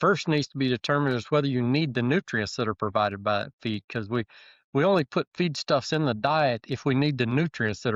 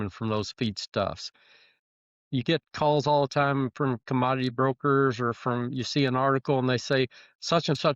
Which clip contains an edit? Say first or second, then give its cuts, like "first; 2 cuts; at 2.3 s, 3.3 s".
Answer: second; 1 cut; at 1.8 s